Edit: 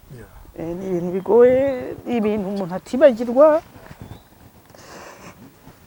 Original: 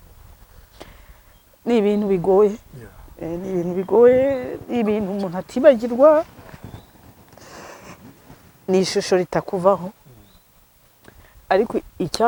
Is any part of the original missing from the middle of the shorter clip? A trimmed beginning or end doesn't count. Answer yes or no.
no